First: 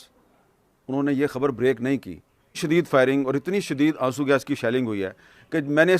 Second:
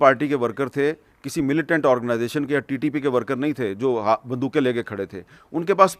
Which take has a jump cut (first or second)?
first